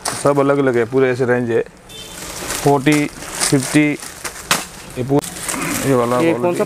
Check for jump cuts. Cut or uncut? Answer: uncut